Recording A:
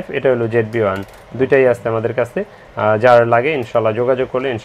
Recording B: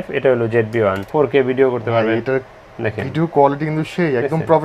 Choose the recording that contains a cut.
B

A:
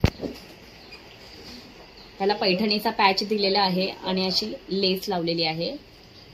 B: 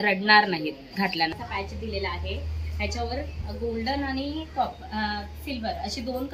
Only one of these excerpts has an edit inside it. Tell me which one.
B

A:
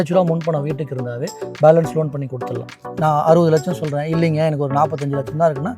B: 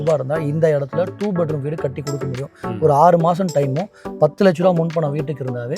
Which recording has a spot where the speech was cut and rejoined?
A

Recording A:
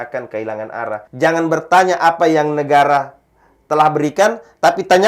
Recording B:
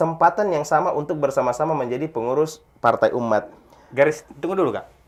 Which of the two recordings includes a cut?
A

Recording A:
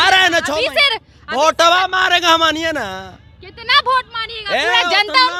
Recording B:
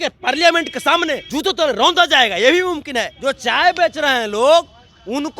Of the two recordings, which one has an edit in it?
B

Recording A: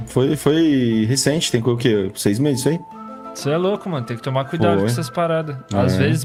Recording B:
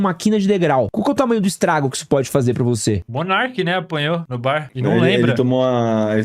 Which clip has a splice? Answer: B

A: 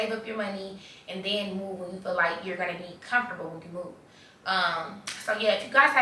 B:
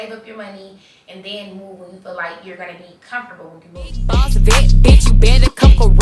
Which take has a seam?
B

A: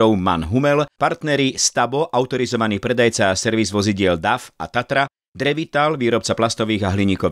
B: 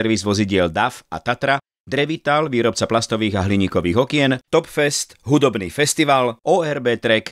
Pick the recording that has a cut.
A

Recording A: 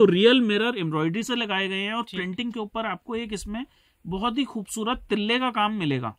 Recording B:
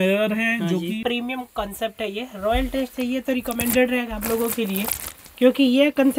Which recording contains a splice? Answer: B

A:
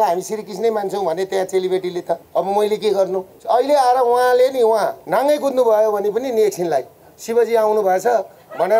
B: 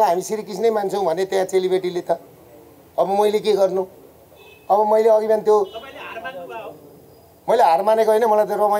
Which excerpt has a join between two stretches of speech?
A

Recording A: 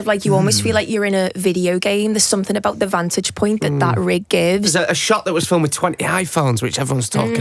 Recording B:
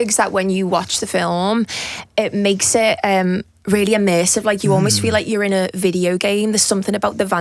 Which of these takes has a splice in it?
A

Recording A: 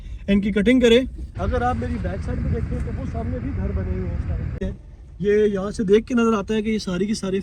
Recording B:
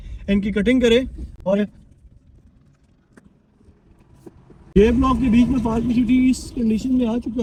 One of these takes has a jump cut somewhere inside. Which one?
A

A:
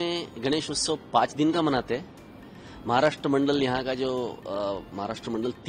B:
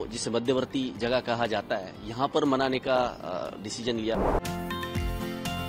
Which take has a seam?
B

